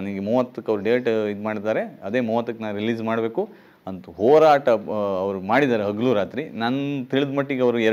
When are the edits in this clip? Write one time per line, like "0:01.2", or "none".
none